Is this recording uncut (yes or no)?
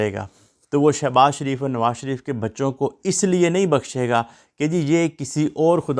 yes